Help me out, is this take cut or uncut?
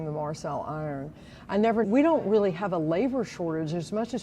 cut